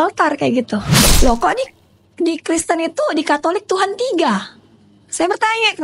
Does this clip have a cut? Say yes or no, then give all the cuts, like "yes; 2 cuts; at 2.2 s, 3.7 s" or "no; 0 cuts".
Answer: yes; 1 cut; at 1.0 s